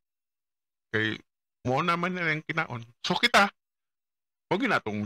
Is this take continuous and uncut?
no; 1 cut; at 1.7 s

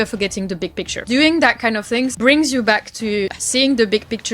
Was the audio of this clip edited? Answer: yes; 3 cuts; at 1.0 s, 2.1 s, 3.4 s

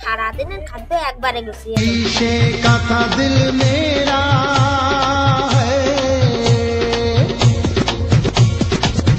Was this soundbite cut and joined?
no; 0 cuts

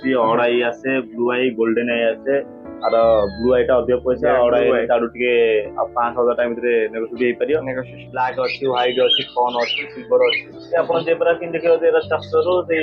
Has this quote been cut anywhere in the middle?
yes; 1 cut; at 7.9 s

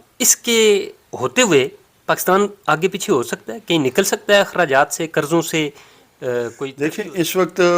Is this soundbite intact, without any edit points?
no; 1 cut; at 6.7 s

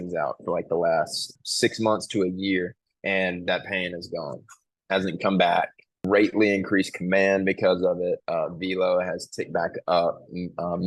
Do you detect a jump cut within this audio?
yes; 2 cuts; at 1.3 s, 5.9 s

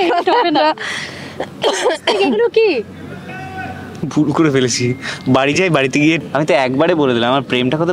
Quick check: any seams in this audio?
yes; 1 cut; at 6.2 s

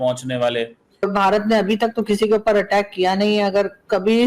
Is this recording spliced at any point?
yes; 1 cut; at 1.0 s

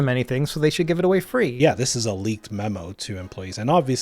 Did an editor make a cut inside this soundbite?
yes; 1 cut; at 1.5 s

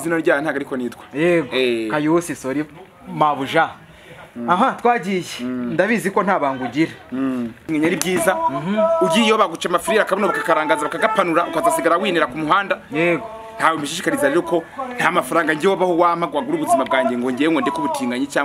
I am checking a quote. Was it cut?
yes; 1 cut; at 7.6 s

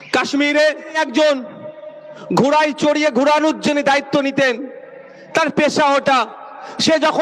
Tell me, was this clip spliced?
yes; 1 cut; at 1.0 s

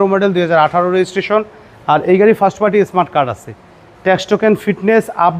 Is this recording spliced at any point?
no; 0 cuts

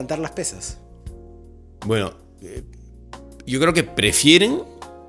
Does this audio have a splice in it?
no; 0 cuts

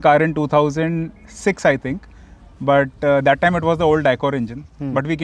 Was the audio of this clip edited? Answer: no; 0 cuts

